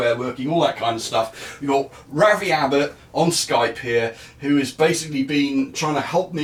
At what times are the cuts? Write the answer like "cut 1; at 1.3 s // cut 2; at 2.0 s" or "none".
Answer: none